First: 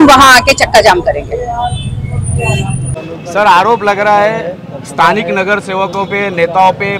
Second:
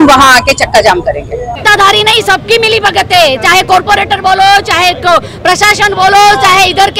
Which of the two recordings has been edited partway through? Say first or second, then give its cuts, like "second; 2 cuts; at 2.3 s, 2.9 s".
second; 1 cut; at 1.6 s